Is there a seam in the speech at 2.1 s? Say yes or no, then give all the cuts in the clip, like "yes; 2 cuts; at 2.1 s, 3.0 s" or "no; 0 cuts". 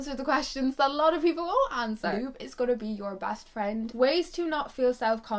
yes; 2 cuts; at 2.1 s, 3.9 s